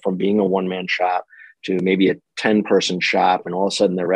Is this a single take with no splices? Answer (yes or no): yes